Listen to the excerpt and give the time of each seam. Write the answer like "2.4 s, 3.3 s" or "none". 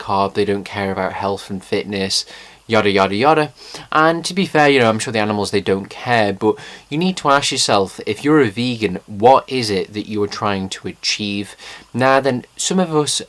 2.7 s